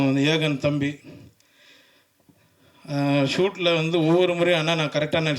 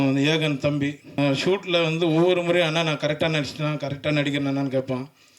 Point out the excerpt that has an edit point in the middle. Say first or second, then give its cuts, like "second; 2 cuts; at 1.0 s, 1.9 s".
second; 1 cut; at 1.2 s